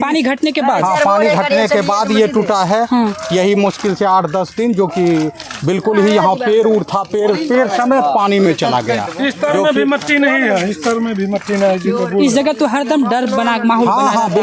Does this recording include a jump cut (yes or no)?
no